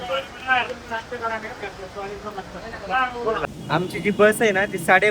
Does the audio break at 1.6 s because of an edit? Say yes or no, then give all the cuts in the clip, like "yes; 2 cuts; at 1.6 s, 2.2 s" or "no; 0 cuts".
no; 1 cut; at 3.5 s